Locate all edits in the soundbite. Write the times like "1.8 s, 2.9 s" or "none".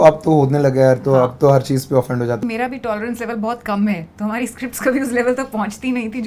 2.4 s